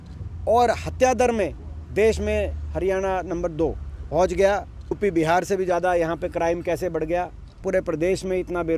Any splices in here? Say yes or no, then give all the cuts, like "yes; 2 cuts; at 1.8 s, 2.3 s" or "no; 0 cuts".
yes; 3 cuts; at 3.9 s, 5.0 s, 7.6 s